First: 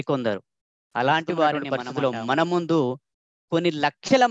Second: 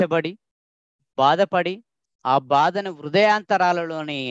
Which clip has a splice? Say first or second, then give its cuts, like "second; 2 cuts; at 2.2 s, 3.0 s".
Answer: first; 1 cut; at 1.7 s